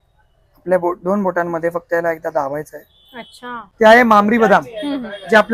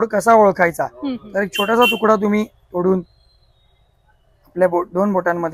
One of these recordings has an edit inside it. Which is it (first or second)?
first